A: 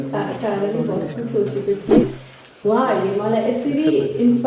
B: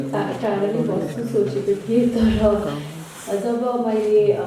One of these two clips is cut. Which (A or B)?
A